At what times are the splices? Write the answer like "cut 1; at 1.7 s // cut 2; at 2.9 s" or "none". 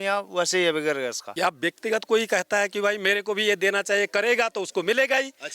cut 1; at 1.2 s